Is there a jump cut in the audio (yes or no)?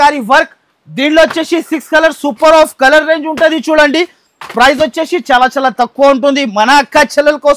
no